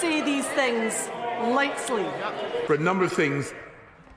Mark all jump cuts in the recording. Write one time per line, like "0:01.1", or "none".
0:02.6